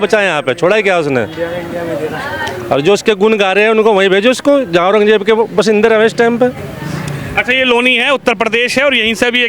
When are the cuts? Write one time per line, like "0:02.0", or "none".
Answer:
none